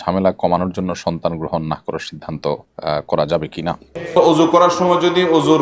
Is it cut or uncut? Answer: cut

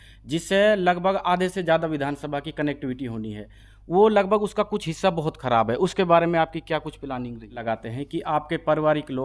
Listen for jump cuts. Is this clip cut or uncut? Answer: cut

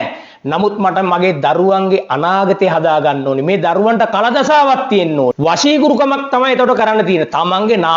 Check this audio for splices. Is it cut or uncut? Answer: uncut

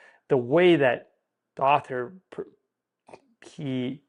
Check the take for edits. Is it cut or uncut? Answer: uncut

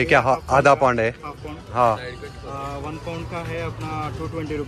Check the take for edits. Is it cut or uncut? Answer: uncut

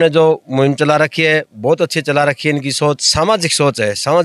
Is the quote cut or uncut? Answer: uncut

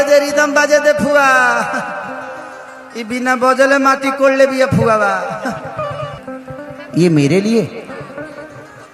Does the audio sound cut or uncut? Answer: cut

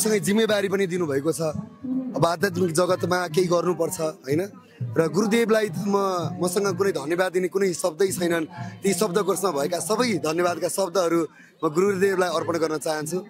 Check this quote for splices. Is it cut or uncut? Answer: uncut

